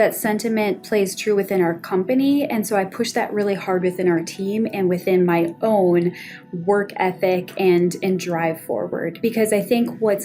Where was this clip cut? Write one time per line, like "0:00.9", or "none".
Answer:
0:09.2

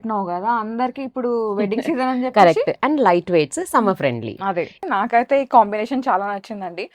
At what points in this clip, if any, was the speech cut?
0:04.8

